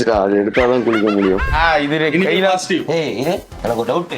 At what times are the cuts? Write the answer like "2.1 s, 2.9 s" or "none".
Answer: 1.6 s